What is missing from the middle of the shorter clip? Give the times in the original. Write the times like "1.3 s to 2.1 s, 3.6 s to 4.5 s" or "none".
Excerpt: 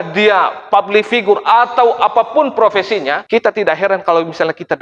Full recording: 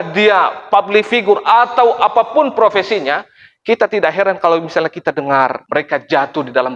3.2 s to 3.6 s

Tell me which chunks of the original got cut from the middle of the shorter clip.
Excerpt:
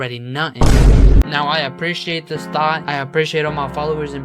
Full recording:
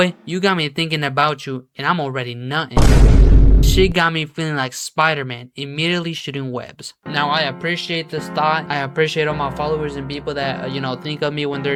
3.4 s to 7.0 s

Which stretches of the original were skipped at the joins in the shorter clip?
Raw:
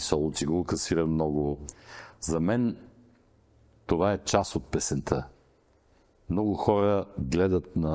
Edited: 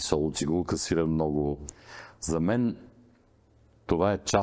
none

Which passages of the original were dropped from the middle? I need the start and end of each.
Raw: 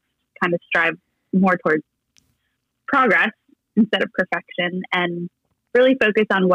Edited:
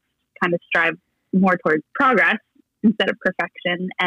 1.9 s to 2.8 s

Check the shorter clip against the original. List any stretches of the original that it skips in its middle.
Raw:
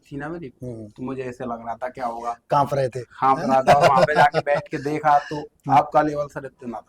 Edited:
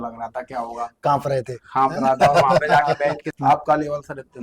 4.7 s to 5.5 s

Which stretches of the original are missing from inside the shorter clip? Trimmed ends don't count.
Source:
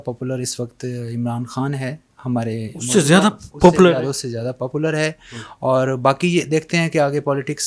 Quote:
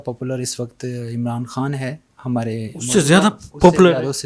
none

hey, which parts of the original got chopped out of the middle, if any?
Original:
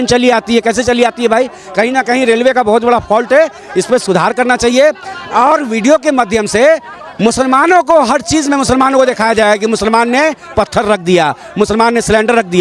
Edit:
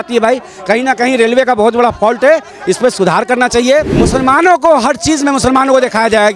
5.1 s to 7.2 s

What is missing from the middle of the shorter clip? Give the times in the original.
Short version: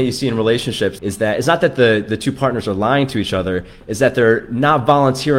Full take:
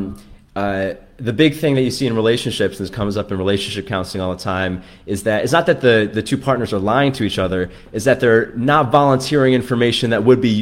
2.8 s to 5.0 s

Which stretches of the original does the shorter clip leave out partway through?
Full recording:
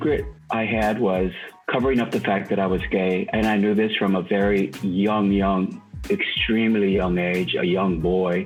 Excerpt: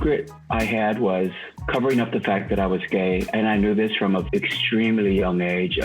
4.2 s to 6.0 s

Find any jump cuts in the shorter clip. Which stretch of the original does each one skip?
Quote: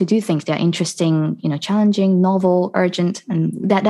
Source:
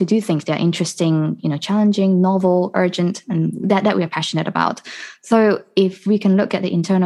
none

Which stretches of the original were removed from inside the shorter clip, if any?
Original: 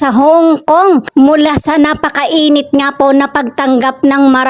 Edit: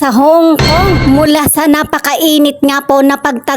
1.0 s to 1.1 s

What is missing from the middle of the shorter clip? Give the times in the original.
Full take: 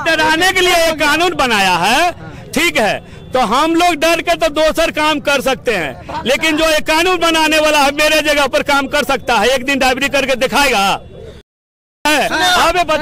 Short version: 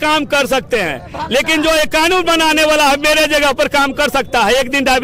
none

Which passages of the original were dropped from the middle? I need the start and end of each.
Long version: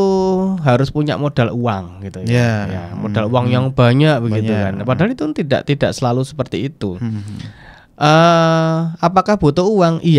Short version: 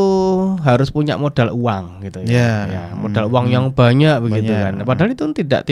none

